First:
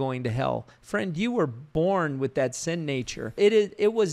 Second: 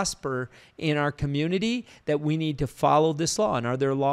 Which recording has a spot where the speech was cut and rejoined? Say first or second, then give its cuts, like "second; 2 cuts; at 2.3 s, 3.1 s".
first; 2 cuts; at 1.7 s, 3.3 s